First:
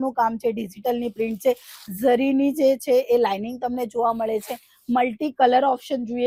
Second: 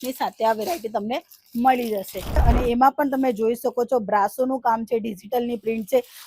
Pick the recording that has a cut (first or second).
second